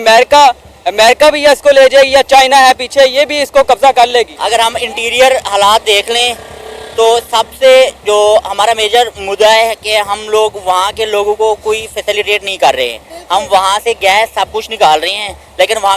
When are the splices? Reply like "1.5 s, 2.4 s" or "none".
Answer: 4.4 s